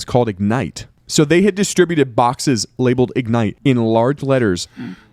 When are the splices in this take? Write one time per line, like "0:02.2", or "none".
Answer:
none